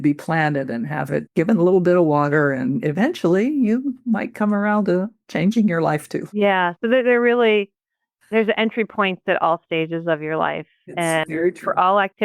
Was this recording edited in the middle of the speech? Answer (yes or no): yes